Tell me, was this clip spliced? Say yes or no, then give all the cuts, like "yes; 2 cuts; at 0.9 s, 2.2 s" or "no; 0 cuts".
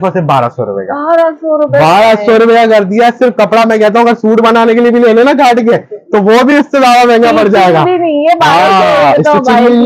no; 0 cuts